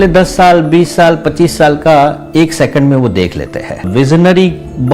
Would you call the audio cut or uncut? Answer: cut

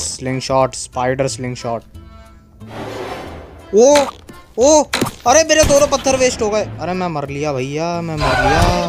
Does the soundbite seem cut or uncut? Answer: uncut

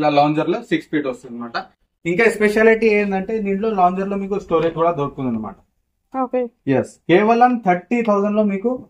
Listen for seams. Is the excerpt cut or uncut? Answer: uncut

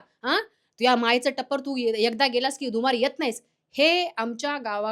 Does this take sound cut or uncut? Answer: uncut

